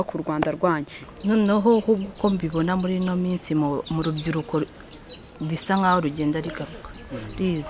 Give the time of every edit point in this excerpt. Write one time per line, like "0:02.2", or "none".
0:01.0